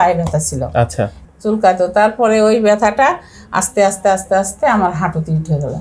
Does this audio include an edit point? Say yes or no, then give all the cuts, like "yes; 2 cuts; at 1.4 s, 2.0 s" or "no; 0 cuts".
yes; 1 cut; at 1.2 s